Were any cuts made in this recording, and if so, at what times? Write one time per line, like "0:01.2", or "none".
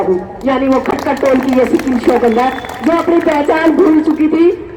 none